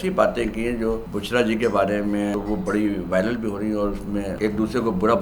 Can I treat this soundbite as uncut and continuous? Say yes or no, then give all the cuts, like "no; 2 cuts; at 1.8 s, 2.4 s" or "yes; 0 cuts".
no; 3 cuts; at 1.1 s, 2.3 s, 4.3 s